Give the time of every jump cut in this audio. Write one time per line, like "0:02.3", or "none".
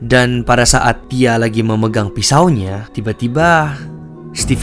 none